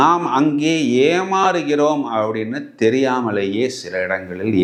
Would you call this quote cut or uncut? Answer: uncut